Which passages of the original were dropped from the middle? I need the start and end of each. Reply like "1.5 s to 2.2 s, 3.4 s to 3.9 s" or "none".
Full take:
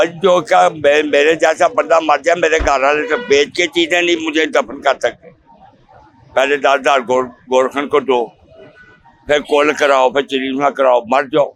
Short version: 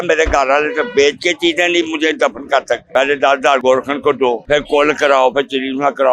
5.2 s to 6.3 s, 7.0 s to 7.5 s, 8.3 s to 9.2 s